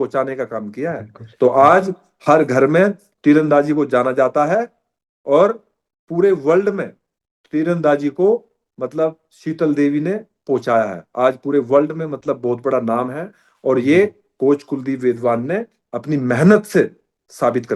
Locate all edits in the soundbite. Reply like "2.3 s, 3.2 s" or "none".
none